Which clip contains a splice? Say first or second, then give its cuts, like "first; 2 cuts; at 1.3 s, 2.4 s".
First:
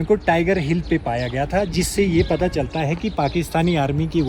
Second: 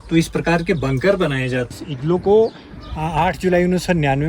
second; 1 cut; at 1.7 s